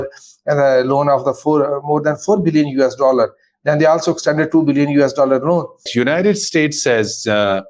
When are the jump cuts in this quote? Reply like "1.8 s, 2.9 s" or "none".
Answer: 5.9 s